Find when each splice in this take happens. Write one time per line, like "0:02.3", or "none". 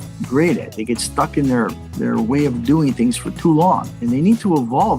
0:03.9